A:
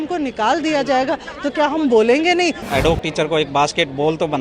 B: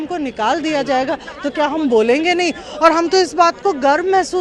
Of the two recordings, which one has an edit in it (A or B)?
A